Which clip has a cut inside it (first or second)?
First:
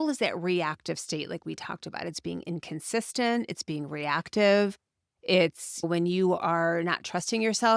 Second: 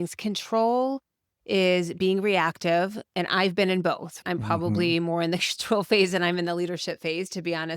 second